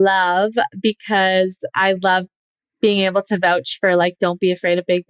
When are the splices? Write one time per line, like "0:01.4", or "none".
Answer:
none